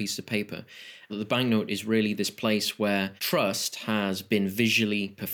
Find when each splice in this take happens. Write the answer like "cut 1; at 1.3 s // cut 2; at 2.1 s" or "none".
cut 1; at 1.1 s // cut 2; at 3.2 s